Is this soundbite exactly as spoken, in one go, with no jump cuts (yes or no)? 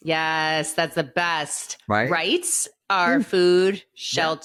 yes